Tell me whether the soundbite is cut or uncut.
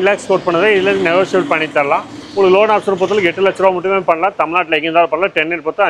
uncut